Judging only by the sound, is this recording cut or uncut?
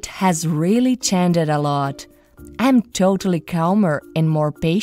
uncut